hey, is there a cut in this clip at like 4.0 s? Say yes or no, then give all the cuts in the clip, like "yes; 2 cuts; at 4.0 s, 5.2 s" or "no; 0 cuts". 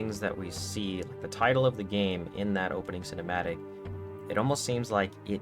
no; 0 cuts